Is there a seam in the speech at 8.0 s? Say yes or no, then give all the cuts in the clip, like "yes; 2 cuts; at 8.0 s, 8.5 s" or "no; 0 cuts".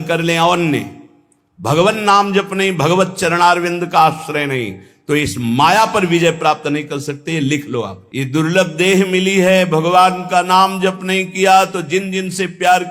yes; 1 cut; at 8.0 s